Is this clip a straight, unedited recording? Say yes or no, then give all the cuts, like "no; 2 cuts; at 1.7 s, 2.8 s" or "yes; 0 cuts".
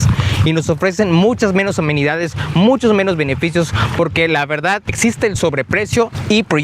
no; 1 cut; at 4.9 s